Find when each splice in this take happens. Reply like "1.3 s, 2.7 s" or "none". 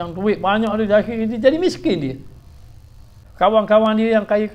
3.2 s